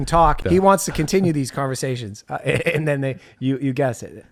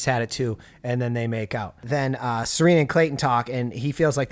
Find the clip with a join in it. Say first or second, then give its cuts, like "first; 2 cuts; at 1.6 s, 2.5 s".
second; 1 cut; at 1.8 s